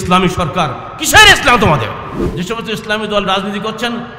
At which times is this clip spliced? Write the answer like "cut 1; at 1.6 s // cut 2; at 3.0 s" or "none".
cut 1; at 2.2 s

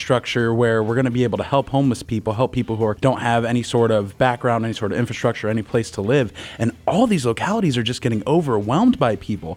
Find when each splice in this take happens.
cut 1; at 2.9 s

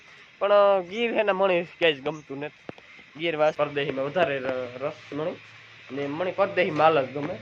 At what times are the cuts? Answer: cut 1; at 3.6 s

